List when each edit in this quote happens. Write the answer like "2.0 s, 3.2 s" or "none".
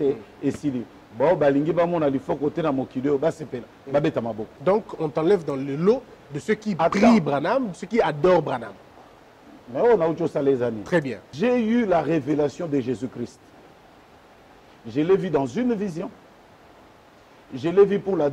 4.5 s, 11.2 s